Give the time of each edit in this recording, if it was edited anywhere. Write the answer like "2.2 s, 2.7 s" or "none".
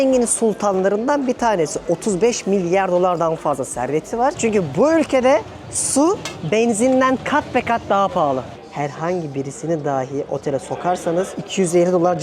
4.4 s, 8.5 s, 11.4 s